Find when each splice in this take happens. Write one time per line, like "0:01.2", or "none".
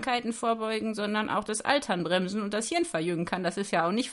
none